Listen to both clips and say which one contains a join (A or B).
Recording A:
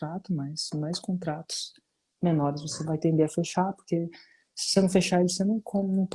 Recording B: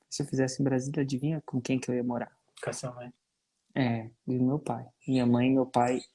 B